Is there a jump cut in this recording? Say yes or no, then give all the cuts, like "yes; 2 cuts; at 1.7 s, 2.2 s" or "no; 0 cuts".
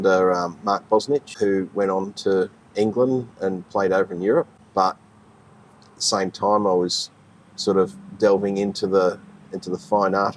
yes; 2 cuts; at 1.3 s, 4.5 s